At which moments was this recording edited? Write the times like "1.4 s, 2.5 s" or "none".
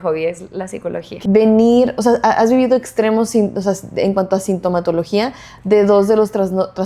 1.1 s